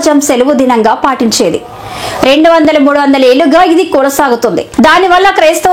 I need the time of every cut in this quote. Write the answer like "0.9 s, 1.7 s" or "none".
4.6 s